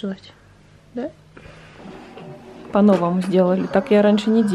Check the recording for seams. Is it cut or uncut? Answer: cut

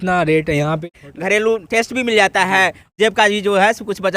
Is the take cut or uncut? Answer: cut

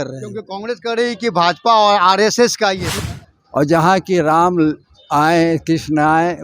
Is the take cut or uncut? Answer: cut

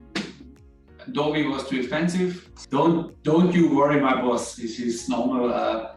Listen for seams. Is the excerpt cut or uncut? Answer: cut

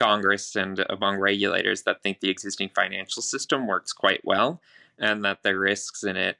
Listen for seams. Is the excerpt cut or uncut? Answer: uncut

